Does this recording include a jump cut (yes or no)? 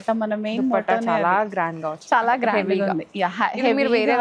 no